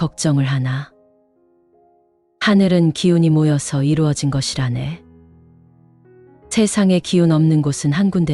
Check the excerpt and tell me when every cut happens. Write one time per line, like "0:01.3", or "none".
0:00.9
0:02.4